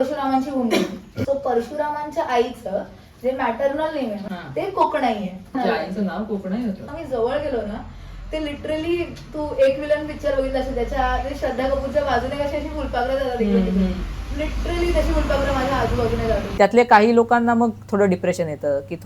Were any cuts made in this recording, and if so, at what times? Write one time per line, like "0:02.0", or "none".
0:01.1
0:04.2
0:05.5
0:06.9
0:16.5

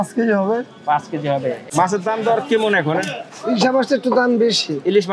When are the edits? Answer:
0:01.6

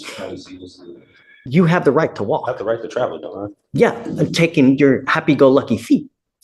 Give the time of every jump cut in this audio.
0:01.3

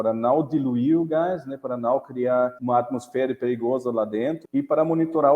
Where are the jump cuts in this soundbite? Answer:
0:02.6
0:04.4

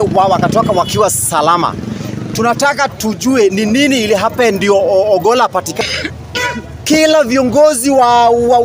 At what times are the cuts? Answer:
0:05.8

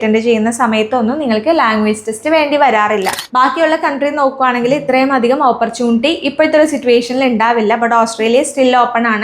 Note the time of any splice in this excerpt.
0:03.2

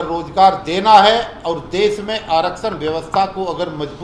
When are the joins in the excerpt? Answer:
none

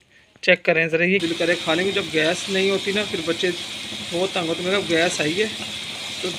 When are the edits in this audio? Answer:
0:01.2

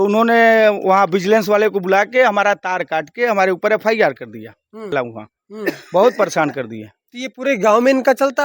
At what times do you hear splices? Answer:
0:04.9

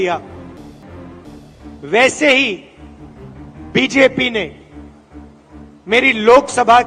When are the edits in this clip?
none

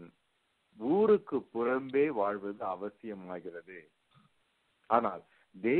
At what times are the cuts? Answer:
none

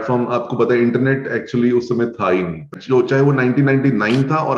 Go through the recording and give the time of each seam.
0:02.7

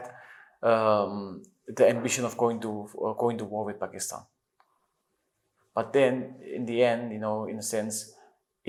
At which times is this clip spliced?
none

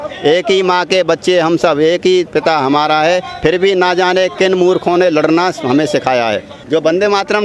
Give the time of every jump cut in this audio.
0:06.5

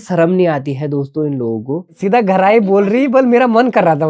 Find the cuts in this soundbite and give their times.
0:02.0

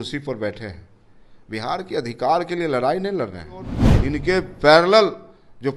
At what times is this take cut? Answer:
0:03.8

